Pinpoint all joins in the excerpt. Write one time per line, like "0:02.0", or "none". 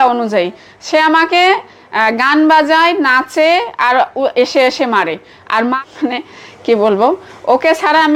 0:05.8

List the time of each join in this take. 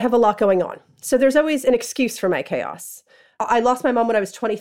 0:03.4

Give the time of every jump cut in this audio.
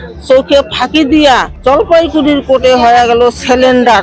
0:01.5

